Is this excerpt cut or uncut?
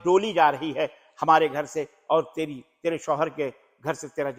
uncut